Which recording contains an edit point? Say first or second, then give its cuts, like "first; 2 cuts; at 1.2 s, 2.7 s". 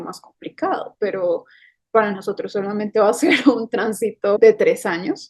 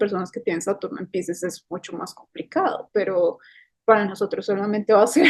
first; 1 cut; at 4.4 s